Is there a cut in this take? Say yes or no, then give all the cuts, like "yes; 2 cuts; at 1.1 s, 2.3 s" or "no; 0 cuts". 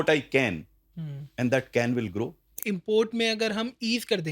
yes; 1 cut; at 2.6 s